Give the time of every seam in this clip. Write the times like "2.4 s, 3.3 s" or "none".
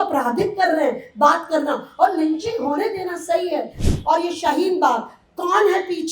3.8 s